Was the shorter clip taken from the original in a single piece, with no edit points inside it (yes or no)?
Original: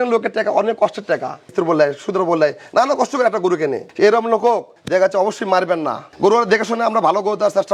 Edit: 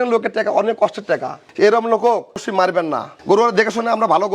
no